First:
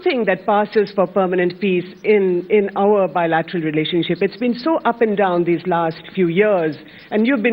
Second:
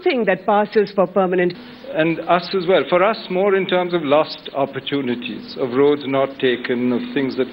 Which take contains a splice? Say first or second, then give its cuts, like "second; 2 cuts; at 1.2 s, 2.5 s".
first; 1 cut; at 1.6 s